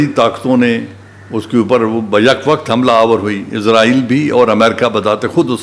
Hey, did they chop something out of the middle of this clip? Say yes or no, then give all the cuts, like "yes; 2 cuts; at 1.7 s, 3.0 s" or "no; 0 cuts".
no; 0 cuts